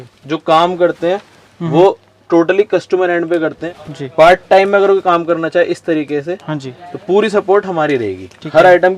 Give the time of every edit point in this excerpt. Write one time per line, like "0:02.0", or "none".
0:03.6